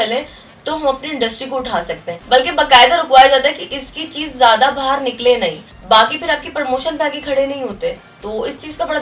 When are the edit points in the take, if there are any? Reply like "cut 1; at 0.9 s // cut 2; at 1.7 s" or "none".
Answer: cut 1; at 2.1 s // cut 2; at 5.7 s // cut 3; at 8.1 s

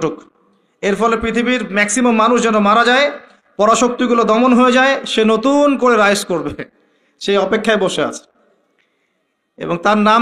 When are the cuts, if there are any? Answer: none

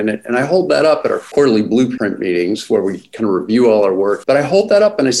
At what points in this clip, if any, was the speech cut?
cut 1; at 1.2 s // cut 2; at 1.9 s // cut 3; at 4.2 s

